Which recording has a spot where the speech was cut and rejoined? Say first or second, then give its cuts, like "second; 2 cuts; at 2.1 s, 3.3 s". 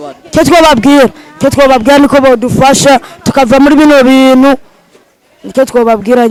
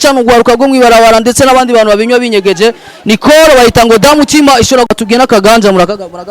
second; 1 cut; at 4.9 s